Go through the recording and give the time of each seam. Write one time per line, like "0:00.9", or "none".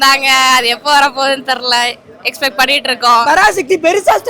0:03.2